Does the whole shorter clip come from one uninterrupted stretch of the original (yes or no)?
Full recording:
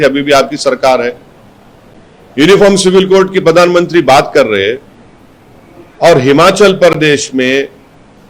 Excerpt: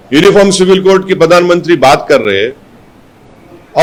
yes